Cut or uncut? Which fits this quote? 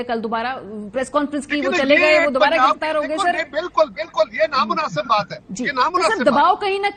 uncut